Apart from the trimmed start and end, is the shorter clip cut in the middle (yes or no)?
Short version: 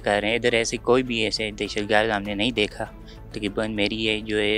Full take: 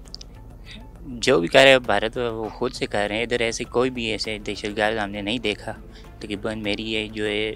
no